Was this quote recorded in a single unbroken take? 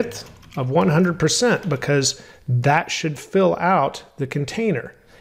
yes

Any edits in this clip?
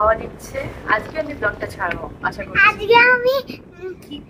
no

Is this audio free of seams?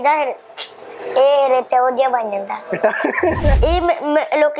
no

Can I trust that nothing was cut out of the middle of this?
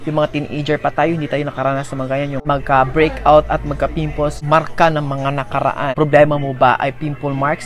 no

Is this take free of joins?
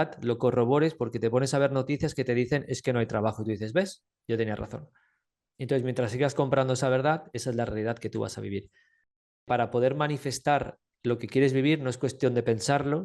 no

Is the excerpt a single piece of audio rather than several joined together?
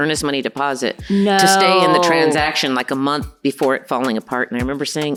yes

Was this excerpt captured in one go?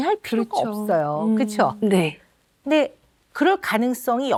yes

